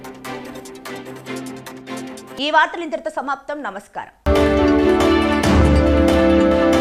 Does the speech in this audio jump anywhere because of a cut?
no; 0 cuts

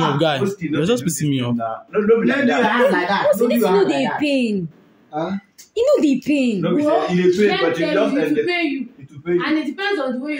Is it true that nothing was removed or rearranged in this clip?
yes; 0 cuts

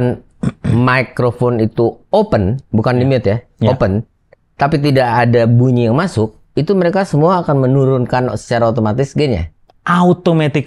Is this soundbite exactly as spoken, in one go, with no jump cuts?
yes; 0 cuts

